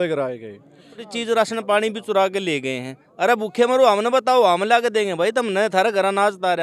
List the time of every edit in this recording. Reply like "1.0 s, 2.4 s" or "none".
1.1 s